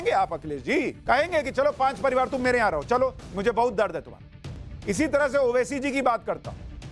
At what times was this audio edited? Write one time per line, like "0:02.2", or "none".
0:01.0
0:04.2